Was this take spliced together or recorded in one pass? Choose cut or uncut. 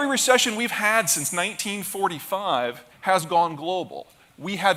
uncut